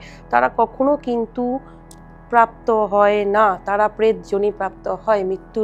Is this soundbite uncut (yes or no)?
yes